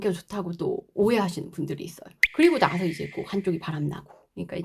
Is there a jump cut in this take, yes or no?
yes